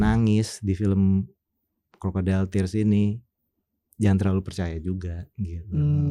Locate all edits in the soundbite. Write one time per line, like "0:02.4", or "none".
none